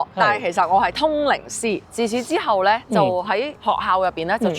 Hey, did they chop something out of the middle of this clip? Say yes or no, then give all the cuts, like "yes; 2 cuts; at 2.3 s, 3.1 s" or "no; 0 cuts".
yes; 2 cuts; at 1.9 s, 3.2 s